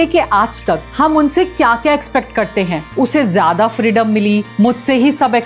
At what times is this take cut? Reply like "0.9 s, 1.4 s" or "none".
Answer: 2.9 s